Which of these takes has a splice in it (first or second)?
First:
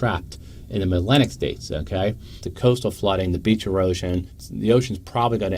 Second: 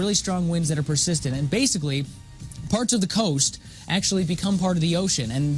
first